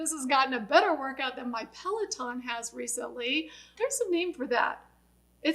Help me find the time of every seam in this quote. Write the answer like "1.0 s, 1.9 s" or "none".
3.7 s